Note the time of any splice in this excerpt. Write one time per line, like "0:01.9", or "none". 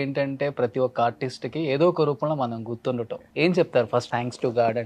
0:03.2
0:04.1